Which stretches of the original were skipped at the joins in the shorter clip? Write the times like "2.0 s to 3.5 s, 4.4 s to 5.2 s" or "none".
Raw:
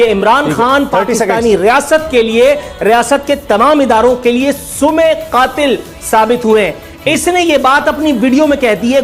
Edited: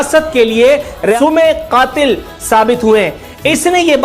2.9 s to 4.8 s